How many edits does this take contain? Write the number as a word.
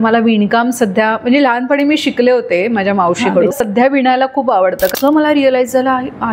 one